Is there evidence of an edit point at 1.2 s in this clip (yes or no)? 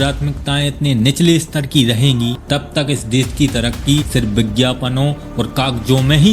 no